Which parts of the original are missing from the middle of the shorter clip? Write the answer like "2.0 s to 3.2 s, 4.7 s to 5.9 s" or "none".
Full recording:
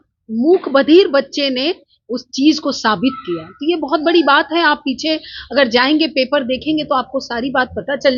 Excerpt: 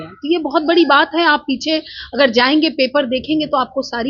none